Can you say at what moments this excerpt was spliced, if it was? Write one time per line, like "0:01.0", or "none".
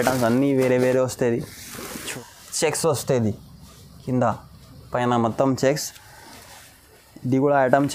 0:02.0